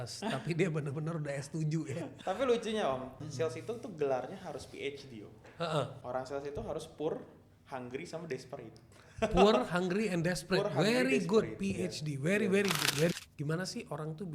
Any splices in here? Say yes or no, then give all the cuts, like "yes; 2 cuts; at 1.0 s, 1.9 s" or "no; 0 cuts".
yes; 4 cuts; at 2.1 s, 3.2 s, 6.0 s, 13.1 s